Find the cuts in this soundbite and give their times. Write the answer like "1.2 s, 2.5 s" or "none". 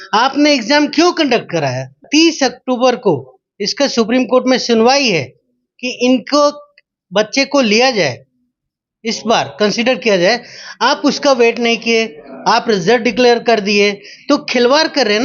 2.1 s